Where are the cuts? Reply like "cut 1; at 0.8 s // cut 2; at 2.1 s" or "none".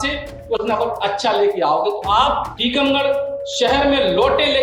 cut 1; at 2.5 s